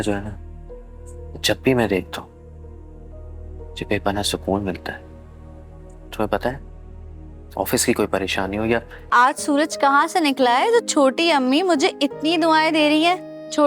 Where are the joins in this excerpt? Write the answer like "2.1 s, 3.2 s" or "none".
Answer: 8.9 s